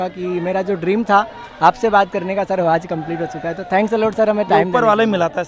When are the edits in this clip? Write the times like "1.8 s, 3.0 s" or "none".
none

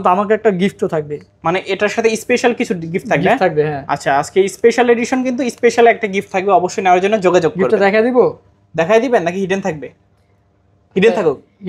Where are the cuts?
none

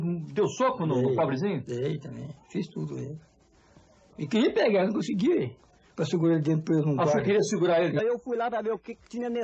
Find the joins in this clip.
none

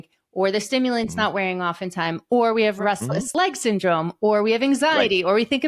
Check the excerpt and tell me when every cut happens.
2.9 s

